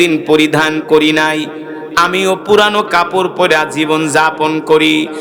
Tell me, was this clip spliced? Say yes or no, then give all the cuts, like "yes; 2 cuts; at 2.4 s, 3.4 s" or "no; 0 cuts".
no; 0 cuts